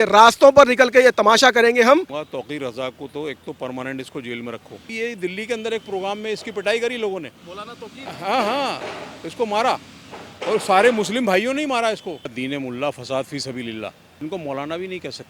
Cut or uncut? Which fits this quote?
cut